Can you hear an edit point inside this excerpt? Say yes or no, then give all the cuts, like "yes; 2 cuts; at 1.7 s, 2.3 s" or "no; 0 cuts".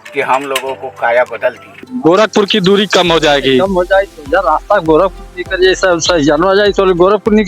yes; 1 cut; at 1.9 s